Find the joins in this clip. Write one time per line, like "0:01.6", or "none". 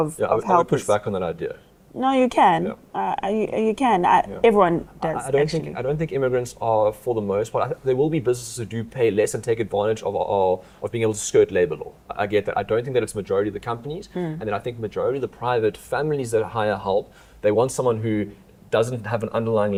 none

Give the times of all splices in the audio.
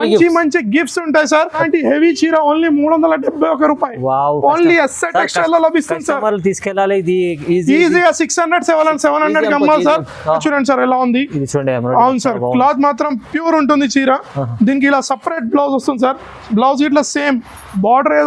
0:01.6
0:10.4

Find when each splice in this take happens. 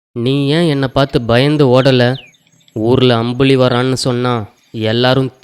none

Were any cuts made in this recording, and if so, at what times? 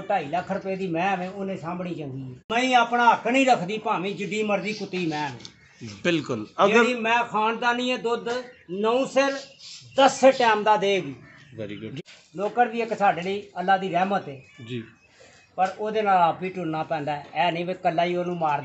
0:02.5
0:11.9

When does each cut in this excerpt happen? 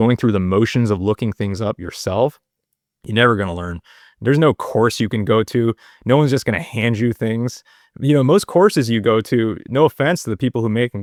none

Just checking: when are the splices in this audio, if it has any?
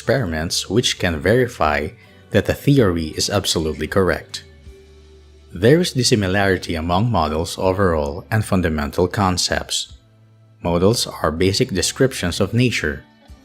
0:08.1

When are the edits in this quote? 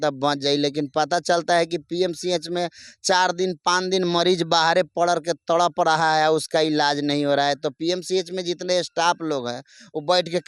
none

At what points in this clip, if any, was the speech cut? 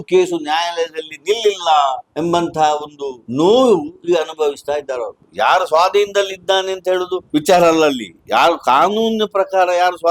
0:02.1
0:03.2
0:05.2
0:07.2

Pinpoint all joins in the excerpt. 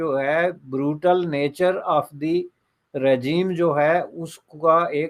none

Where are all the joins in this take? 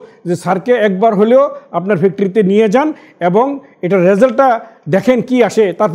none

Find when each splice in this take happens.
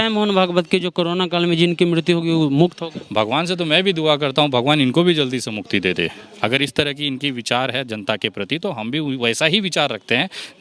none

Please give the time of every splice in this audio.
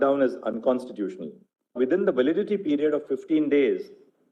0:01.8

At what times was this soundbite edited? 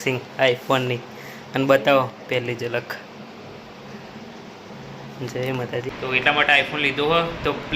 0:05.9

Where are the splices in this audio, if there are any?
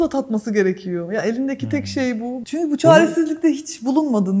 0:02.4

